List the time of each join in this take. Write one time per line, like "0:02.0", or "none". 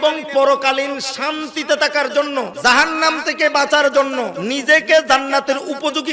0:02.5
0:04.4

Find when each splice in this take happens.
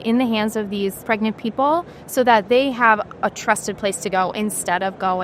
0:01.0

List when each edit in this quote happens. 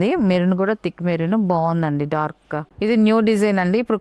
0:02.7

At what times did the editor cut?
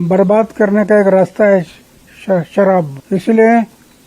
0:03.0

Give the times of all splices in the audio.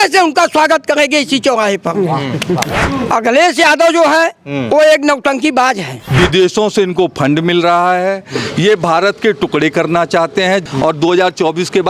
0:02.8
0:06.0
0:10.6

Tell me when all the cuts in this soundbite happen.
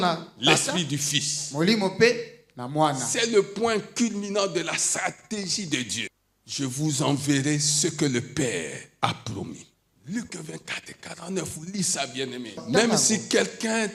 0:06.1
0:09.6
0:12.6

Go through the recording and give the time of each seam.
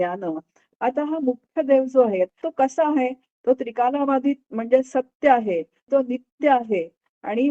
0:02.4
0:05.8

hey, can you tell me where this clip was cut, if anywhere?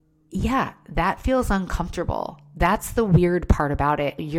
none

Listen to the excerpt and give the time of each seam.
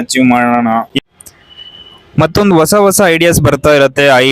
0:01.0

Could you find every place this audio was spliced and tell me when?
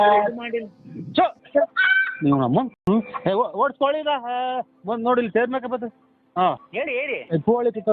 0:06.6

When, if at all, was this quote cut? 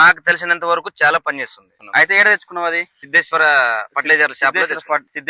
none

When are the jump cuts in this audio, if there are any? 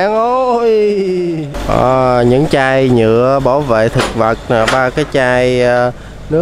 0:01.5

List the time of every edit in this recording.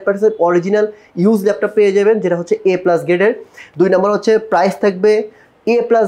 none

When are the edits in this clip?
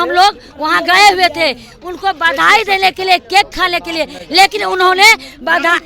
none

